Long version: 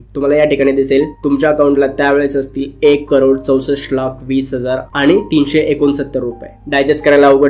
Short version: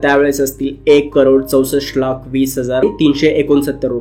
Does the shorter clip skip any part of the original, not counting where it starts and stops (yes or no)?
yes